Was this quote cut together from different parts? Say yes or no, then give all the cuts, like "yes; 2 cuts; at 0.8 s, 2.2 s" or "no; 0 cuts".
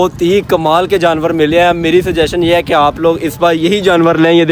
no; 0 cuts